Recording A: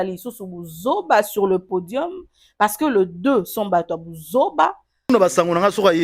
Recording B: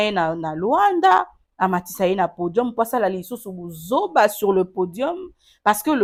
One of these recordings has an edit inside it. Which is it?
A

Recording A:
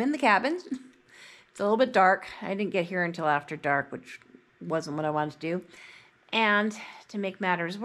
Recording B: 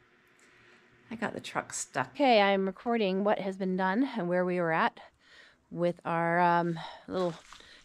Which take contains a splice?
B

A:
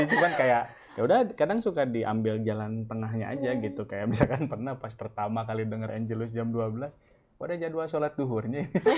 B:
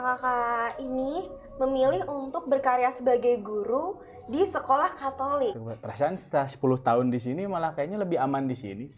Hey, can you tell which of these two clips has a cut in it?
B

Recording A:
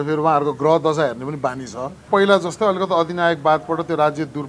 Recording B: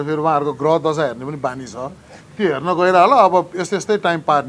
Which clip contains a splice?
A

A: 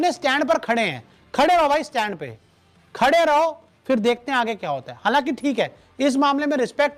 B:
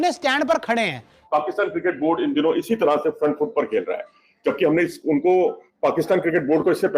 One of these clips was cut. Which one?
B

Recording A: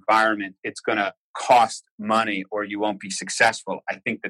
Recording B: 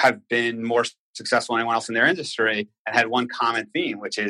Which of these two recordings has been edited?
A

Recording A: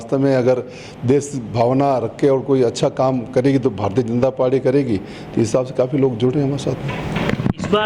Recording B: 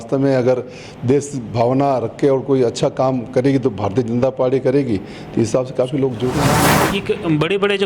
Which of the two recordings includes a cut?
B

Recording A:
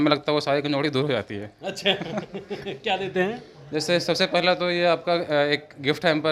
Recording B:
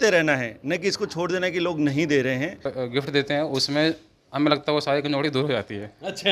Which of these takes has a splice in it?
B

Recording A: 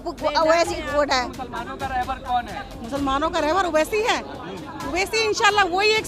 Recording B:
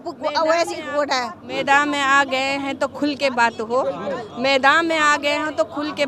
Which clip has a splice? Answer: A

